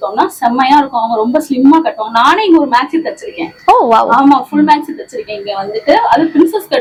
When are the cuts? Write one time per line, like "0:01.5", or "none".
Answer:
none